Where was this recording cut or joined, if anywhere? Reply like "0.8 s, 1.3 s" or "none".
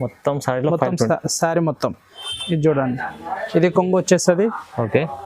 2.2 s